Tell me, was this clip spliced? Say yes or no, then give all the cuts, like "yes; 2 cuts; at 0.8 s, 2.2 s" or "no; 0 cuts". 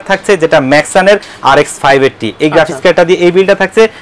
no; 0 cuts